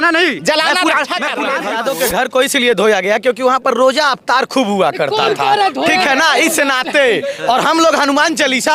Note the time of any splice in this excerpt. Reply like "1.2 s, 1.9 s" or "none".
1.7 s